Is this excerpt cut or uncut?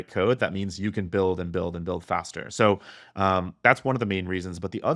uncut